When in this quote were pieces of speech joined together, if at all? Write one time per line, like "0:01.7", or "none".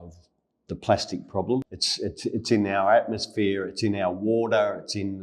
0:01.8